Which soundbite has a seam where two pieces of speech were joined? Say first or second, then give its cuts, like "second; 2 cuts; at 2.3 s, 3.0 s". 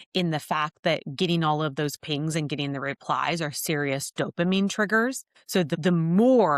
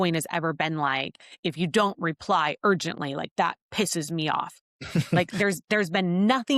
first; 1 cut; at 5.7 s